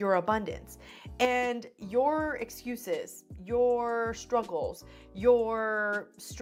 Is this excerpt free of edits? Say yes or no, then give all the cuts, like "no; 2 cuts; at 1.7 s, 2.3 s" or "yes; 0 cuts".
yes; 0 cuts